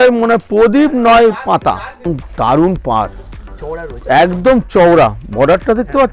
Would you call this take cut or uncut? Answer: cut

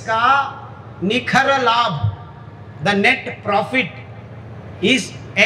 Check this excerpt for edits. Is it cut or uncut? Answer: uncut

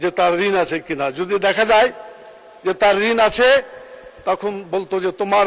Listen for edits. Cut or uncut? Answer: uncut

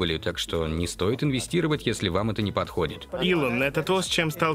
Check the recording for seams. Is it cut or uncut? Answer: cut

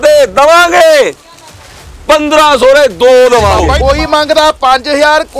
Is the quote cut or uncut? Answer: cut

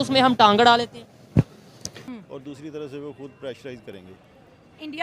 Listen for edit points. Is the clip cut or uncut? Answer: cut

